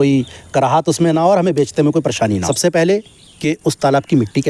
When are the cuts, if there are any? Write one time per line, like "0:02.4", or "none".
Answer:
0:02.4

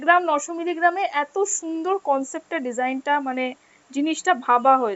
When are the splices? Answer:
none

